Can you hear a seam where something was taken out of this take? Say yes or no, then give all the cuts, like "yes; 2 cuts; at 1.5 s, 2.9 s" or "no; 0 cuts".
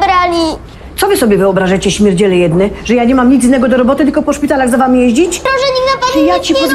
yes; 1 cut; at 5.5 s